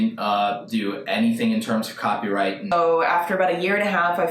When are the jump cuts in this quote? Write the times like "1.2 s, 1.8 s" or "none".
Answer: 2.7 s